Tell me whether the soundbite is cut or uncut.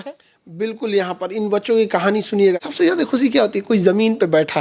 cut